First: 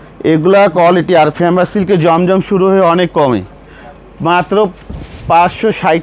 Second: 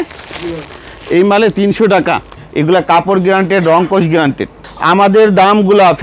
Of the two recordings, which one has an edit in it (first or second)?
second